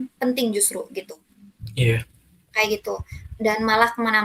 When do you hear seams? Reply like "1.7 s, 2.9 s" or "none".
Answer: none